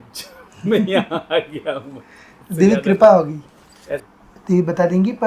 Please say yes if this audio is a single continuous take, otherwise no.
no